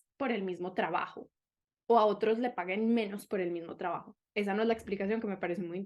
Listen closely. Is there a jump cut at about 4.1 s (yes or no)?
no